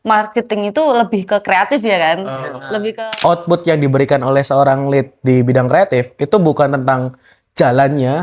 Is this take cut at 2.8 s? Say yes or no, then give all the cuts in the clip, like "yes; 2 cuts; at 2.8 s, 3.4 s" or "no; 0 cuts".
yes; 1 cut; at 2.8 s